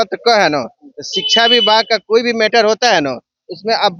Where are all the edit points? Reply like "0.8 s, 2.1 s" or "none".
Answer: none

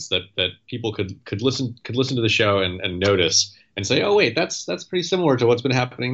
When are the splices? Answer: none

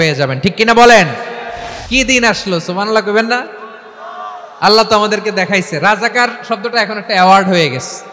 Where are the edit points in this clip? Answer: 1.7 s

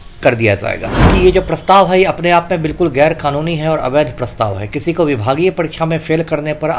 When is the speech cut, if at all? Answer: 1.1 s

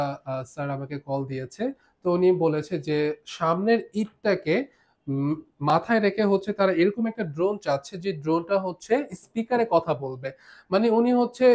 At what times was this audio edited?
none

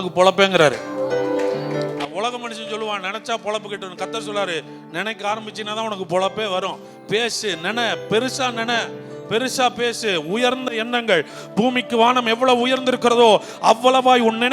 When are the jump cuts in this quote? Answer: none

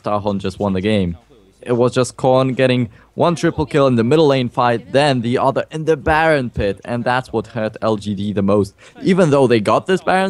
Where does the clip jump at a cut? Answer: 6.8 s

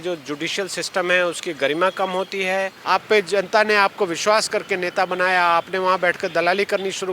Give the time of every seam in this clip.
2.8 s

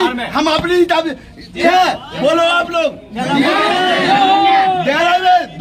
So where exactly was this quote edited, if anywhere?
1.6 s

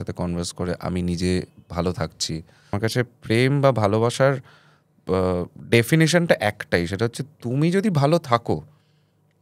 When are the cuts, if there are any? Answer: 2.7 s

